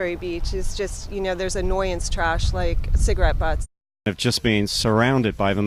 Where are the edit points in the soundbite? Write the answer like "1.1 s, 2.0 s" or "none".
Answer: 4.0 s

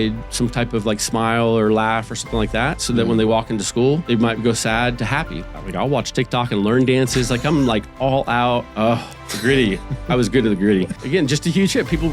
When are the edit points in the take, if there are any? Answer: 4.0 s, 5.4 s, 8.7 s, 11.0 s

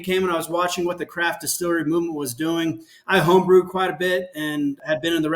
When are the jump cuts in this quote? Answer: none

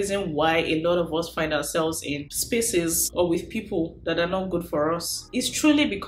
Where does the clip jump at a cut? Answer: none

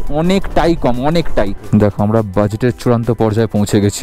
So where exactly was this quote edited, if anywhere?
1.6 s

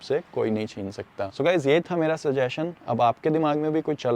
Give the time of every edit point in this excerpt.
none

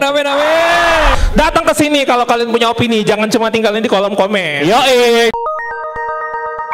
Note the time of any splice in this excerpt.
1.1 s, 5.3 s

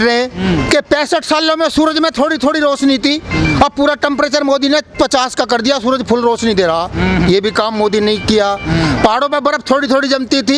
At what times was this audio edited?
none

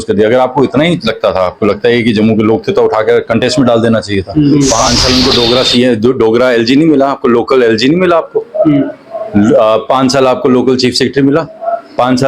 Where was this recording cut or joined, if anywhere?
4.5 s

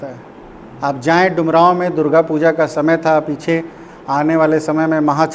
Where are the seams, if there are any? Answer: none

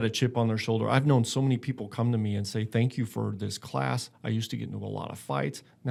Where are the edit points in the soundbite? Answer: none

